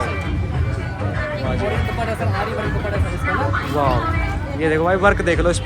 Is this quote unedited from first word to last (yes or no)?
yes